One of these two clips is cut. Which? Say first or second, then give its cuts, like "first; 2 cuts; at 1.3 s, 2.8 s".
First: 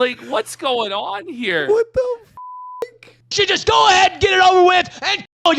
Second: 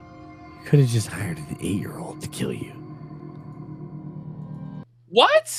first; 1 cut; at 3.0 s